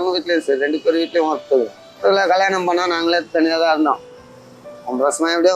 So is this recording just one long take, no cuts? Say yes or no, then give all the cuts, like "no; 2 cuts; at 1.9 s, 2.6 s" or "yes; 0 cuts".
no; 1 cut; at 2.0 s